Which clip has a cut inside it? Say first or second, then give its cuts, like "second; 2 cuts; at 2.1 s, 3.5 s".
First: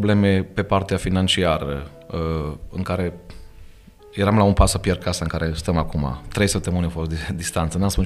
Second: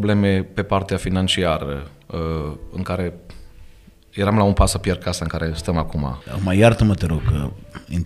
second; 1 cut; at 6.2 s